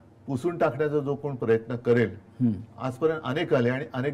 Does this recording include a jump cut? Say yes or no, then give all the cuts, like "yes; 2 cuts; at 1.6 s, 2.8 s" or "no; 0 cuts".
no; 0 cuts